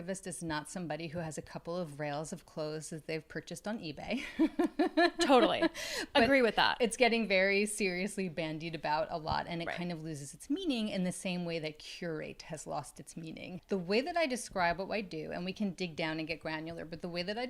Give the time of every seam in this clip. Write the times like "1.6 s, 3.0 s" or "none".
none